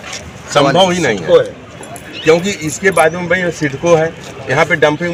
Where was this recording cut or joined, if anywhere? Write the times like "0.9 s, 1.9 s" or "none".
none